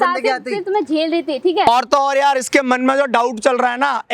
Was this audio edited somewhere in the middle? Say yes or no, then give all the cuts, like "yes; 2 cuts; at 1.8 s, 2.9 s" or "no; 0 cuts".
yes; 1 cut; at 1.6 s